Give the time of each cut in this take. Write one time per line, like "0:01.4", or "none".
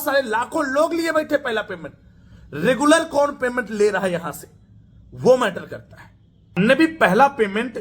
0:06.6

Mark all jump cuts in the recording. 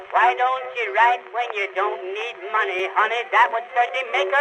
0:02.8

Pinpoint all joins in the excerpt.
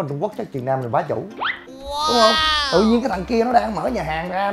0:01.9

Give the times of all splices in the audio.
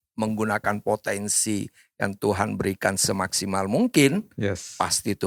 none

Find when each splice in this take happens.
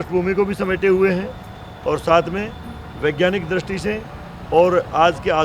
none

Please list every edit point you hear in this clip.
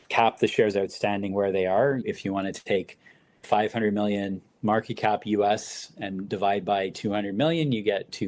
0:02.0

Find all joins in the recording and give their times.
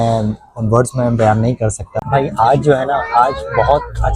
0:01.9

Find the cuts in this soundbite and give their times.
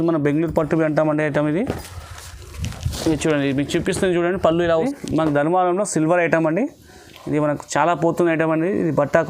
0:04.7

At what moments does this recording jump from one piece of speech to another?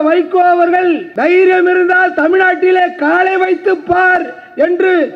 0:01.1

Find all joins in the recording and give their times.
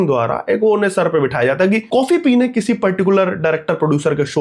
0:01.8

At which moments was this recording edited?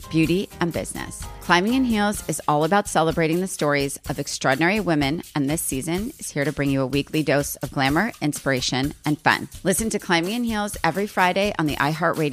none

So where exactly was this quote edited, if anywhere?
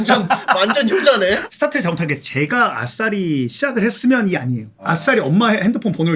0:01.5
0:04.7

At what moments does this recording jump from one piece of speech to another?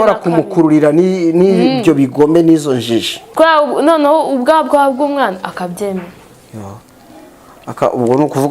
0:03.2

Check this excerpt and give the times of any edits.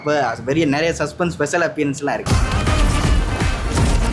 0:02.2

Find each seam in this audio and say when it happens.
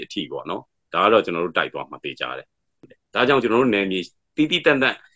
0:02.8

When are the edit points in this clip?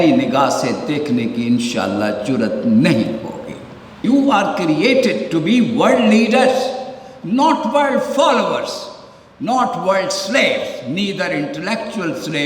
0:04.0

